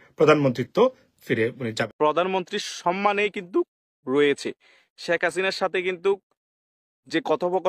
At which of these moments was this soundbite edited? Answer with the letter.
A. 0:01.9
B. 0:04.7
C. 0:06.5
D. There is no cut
A